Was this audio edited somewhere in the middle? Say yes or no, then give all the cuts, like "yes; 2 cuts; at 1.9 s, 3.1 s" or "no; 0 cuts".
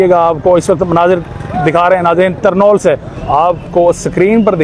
yes; 1 cut; at 3.1 s